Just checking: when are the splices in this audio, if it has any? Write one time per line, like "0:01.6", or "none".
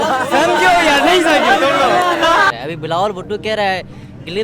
0:02.5